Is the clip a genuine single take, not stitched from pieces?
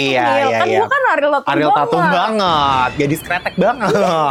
yes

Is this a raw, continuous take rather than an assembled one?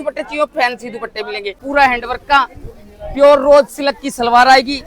no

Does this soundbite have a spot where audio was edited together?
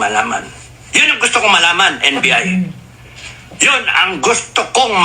no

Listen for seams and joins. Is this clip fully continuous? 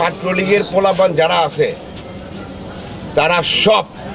yes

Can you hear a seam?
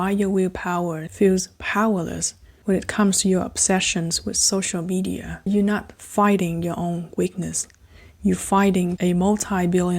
yes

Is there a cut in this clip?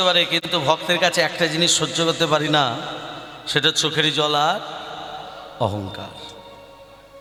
no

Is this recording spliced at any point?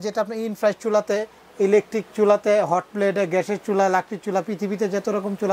no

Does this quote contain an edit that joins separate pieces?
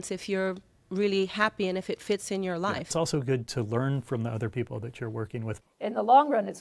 yes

